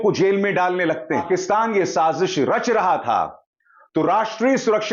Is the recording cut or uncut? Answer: cut